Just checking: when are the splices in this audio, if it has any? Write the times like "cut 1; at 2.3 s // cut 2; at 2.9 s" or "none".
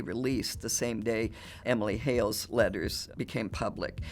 cut 1; at 3.0 s